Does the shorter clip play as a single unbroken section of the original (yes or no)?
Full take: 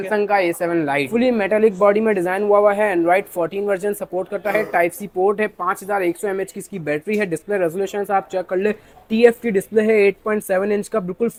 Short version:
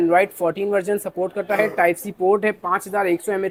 yes